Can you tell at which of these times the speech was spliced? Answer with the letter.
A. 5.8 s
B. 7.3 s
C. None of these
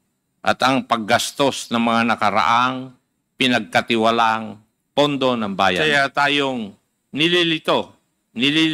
A